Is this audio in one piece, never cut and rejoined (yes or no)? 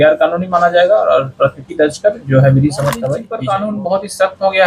no